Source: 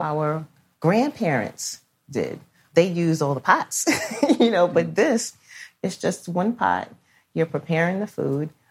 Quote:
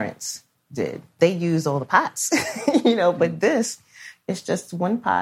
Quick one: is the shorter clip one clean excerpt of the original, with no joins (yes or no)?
no